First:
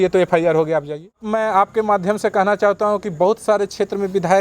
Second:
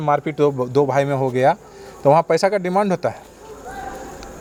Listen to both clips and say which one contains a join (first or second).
first